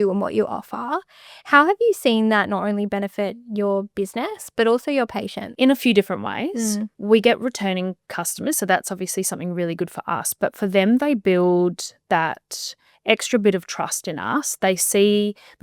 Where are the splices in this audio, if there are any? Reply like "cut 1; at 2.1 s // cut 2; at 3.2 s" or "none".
cut 1; at 5.4 s // cut 2; at 6.9 s

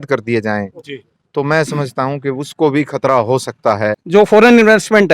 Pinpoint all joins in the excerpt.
cut 1; at 4.0 s

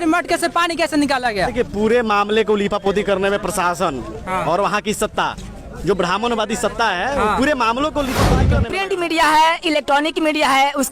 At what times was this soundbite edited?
cut 1; at 8.5 s

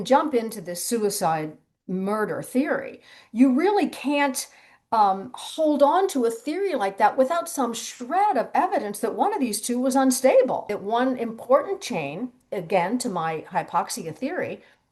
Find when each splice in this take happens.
cut 1; at 10.8 s

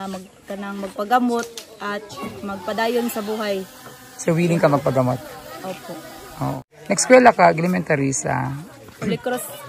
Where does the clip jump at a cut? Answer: cut 1; at 6.6 s

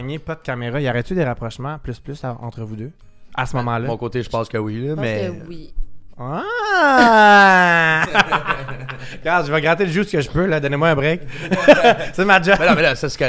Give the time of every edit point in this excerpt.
none

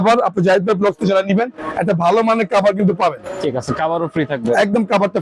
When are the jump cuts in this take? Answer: none

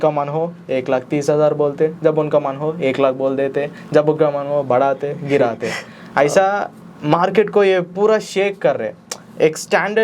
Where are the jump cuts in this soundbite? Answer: none

